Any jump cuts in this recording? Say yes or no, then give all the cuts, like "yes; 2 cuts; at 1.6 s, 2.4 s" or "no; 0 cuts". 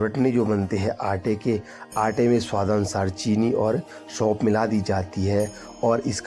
no; 0 cuts